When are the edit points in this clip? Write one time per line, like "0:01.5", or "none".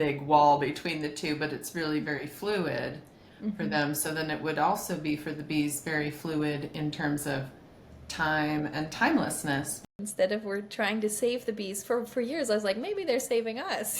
0:09.9